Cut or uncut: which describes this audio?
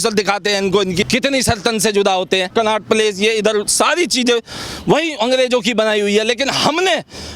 cut